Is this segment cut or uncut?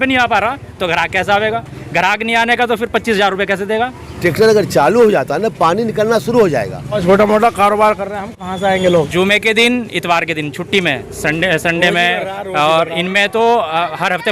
cut